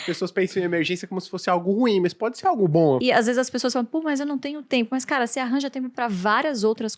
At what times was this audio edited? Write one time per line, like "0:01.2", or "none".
0:03.0